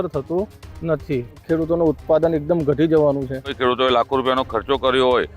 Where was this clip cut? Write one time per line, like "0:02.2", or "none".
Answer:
0:01.4
0:03.5